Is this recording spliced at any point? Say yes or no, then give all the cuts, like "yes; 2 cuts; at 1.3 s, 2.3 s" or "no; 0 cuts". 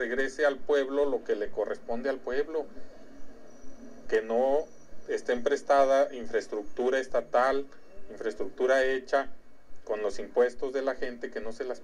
no; 0 cuts